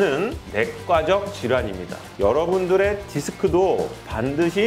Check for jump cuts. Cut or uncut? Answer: cut